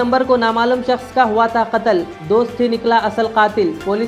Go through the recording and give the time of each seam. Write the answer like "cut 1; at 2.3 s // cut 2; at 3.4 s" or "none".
none